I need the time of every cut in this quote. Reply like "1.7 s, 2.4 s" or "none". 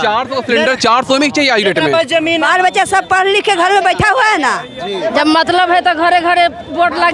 2.4 s, 5.1 s